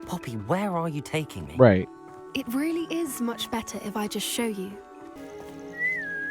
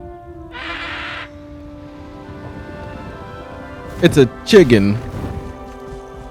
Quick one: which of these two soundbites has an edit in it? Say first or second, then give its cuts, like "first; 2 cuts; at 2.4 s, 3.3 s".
first; 1 cut; at 5.2 s